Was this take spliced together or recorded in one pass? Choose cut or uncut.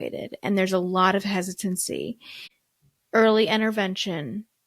cut